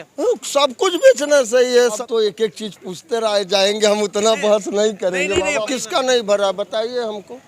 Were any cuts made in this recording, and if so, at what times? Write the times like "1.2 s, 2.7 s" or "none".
2.0 s, 5.6 s